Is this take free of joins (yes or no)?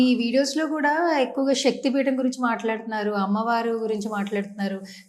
yes